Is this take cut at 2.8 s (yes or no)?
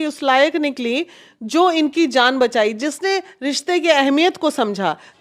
no